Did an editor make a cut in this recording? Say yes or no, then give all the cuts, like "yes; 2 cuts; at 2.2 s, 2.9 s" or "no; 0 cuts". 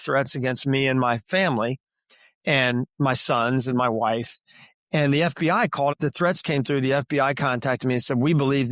yes; 1 cut; at 5.9 s